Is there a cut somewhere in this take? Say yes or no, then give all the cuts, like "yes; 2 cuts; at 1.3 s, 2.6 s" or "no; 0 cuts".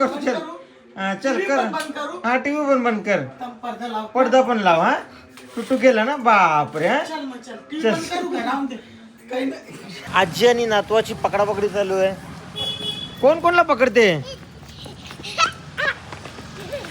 yes; 1 cut; at 9.9 s